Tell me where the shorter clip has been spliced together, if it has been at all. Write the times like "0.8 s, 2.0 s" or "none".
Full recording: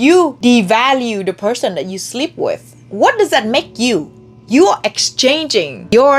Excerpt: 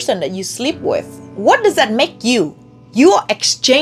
none